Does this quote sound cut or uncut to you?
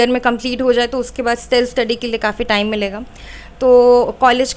uncut